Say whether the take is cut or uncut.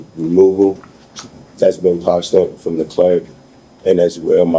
uncut